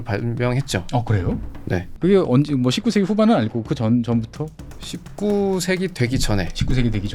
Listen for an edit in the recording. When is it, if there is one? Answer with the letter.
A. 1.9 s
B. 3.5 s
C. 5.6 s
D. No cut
A